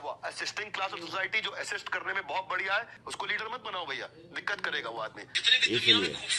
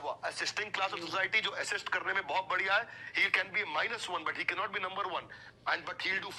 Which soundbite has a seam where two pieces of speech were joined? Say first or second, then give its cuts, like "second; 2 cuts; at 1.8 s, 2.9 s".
first; 2 cuts; at 3.0 s, 5.4 s